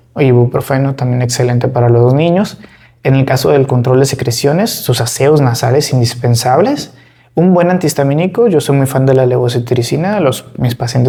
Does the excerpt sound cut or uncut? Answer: uncut